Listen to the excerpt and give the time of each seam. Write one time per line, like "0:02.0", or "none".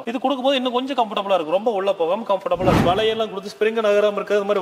0:02.8